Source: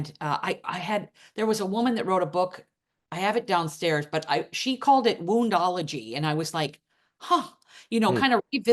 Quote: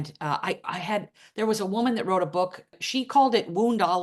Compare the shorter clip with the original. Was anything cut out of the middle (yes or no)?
yes